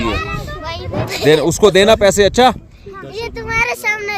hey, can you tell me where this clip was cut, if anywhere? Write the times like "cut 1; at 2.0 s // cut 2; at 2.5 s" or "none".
cut 1; at 1.1 s